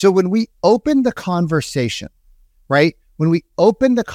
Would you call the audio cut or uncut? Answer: uncut